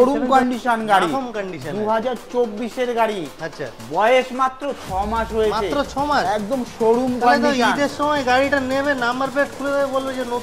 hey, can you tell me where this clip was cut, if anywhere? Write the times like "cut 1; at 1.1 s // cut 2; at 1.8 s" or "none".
none